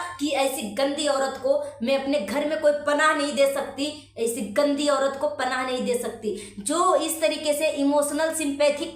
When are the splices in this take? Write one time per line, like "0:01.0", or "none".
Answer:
none